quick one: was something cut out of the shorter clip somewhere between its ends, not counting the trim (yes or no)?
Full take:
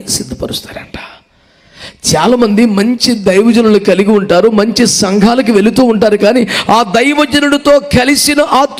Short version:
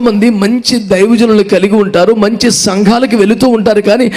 no